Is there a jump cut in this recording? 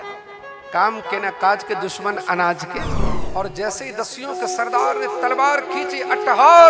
yes; 1 cut; at 3.2 s

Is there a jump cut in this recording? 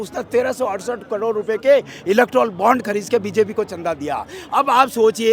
no; 0 cuts

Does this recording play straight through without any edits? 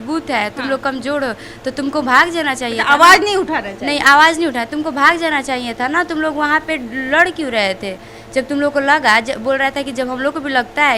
yes; 0 cuts

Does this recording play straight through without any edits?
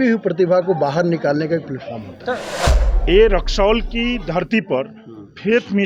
no; 1 cut; at 2.8 s

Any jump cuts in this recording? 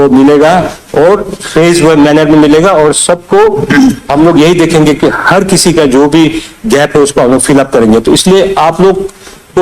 no; 0 cuts

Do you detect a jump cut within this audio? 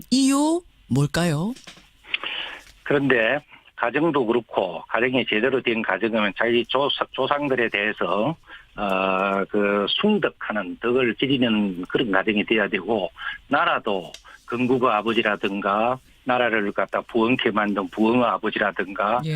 yes; 1 cut; at 16.9 s

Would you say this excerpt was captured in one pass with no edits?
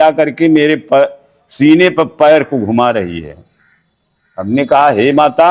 yes; 0 cuts

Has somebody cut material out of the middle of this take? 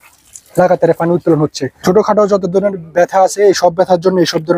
yes; 1 cut; at 1.7 s

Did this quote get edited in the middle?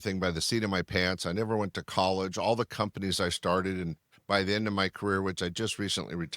no; 0 cuts

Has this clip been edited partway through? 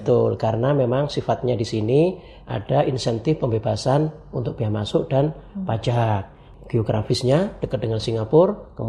yes; 1 cut; at 6.5 s

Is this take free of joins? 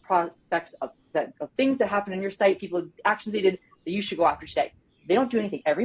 yes; 0 cuts

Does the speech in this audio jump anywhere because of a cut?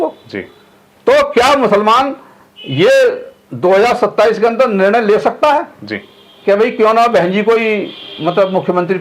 no; 0 cuts

